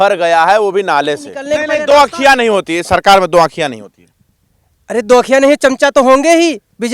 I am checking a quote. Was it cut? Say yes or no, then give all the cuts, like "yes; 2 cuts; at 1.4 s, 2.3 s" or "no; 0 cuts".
yes; 1 cut; at 1.4 s